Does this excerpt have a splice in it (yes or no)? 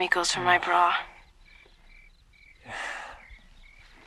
no